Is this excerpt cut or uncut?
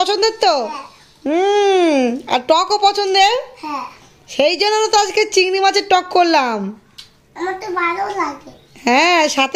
uncut